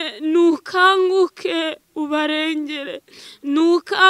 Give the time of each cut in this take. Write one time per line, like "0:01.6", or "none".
none